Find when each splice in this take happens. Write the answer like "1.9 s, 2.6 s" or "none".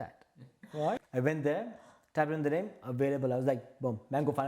1.0 s